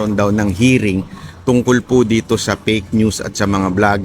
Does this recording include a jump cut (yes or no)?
yes